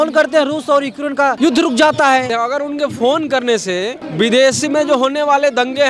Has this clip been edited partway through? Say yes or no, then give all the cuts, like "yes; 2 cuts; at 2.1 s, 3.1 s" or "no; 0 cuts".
yes; 3 cuts; at 1.4 s, 2.3 s, 4.0 s